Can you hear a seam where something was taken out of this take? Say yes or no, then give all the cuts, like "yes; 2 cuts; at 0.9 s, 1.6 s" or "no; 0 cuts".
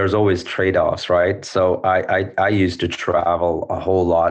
no; 0 cuts